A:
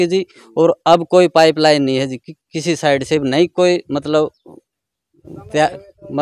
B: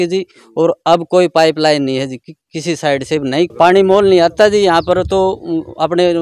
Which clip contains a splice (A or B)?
B